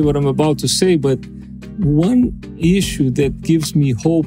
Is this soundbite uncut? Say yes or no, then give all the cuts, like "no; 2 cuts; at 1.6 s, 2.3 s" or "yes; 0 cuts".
no; 1 cut; at 2.4 s